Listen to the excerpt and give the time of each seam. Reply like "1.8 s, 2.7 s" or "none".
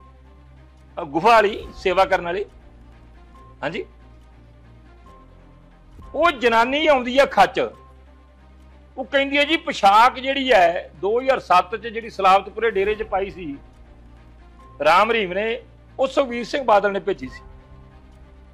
0.9 s